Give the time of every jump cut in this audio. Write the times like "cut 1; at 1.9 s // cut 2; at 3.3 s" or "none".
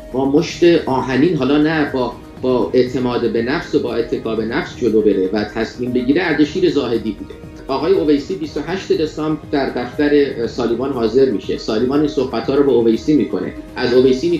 cut 1; at 7.6 s